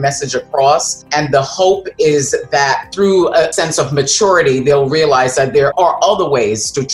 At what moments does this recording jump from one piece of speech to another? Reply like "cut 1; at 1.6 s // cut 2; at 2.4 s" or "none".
cut 1; at 1.0 s // cut 2; at 3.5 s // cut 3; at 5.7 s